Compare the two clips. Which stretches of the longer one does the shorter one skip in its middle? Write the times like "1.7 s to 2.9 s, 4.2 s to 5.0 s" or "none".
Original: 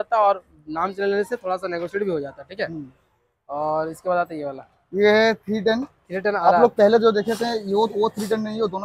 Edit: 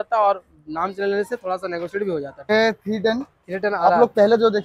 2.5 s to 5.1 s